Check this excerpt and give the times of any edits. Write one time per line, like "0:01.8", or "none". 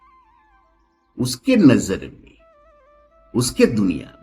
0:01.1

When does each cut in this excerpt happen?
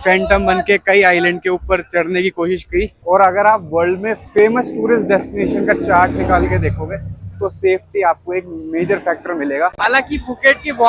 0:03.0
0:09.8

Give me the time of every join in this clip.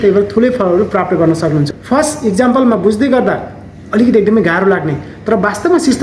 0:01.7

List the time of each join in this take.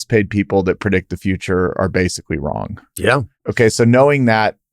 0:03.4

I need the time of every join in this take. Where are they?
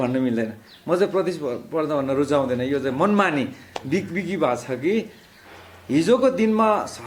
none

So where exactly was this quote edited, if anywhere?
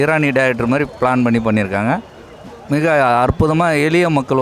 none

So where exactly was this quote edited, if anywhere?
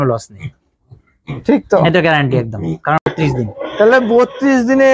0:03.1

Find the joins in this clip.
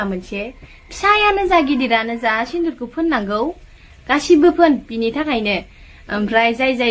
none

